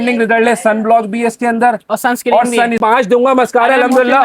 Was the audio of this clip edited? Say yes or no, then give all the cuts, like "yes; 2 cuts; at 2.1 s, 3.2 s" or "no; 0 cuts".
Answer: yes; 1 cut; at 2.8 s